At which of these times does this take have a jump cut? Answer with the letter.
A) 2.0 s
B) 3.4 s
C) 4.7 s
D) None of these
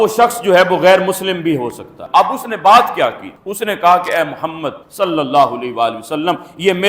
A